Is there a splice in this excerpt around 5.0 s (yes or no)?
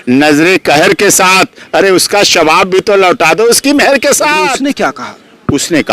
yes